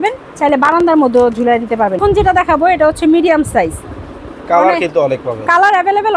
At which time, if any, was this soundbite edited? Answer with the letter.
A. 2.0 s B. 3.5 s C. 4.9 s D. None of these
A